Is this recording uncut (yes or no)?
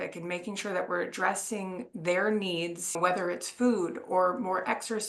no